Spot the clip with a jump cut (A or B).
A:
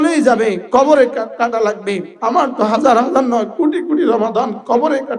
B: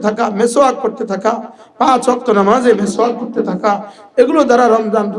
A